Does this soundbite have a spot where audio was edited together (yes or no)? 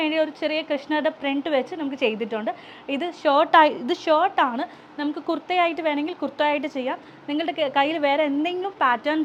no